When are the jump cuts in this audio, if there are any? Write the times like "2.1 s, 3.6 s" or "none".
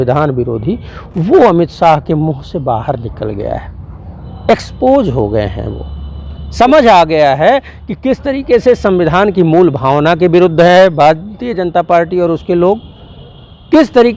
none